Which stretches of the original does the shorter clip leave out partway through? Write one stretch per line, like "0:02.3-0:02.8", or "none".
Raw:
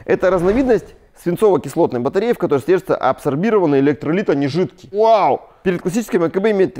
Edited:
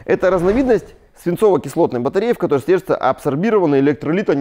none